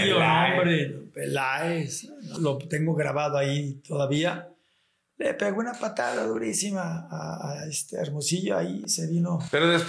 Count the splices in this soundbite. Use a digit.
1